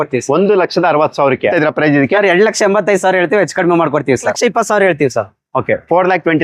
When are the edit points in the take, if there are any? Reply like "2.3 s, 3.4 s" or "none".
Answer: 1.5 s, 4.3 s